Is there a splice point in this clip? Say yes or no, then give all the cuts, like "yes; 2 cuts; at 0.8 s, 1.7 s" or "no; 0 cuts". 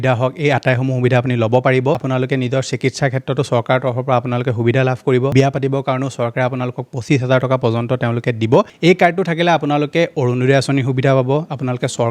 yes; 3 cuts; at 2.0 s, 5.3 s, 8.7 s